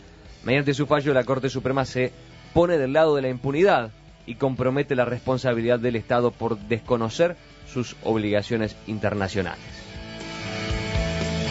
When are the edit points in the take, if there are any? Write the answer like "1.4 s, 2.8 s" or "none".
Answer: 3.4 s